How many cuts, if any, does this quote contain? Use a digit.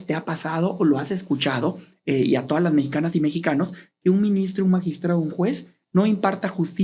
0